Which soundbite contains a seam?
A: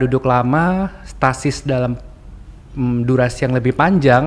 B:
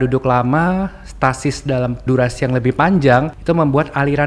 B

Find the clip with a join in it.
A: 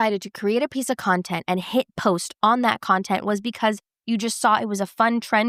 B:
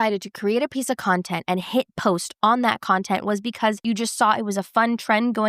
B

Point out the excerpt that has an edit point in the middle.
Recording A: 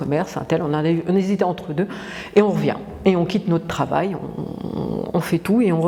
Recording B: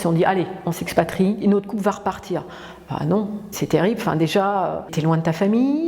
B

